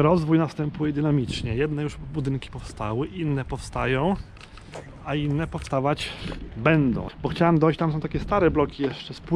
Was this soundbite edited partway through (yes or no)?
yes